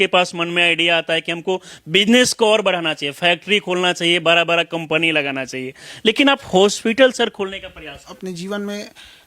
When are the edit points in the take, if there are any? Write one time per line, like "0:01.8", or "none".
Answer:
0:08.1